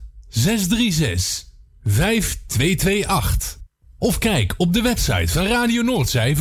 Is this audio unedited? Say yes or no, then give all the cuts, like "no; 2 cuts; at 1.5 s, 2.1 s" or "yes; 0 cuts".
yes; 0 cuts